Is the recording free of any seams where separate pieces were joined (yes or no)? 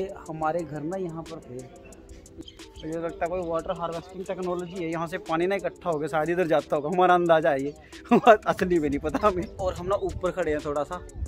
no